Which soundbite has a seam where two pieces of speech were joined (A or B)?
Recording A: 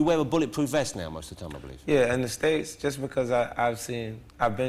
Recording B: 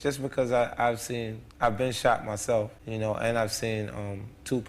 B